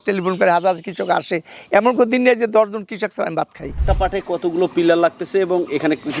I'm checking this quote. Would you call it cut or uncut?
cut